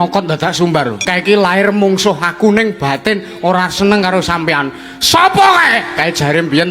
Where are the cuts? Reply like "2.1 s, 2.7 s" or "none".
1.0 s